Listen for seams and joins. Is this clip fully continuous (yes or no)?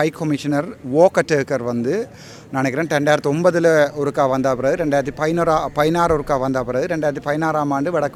yes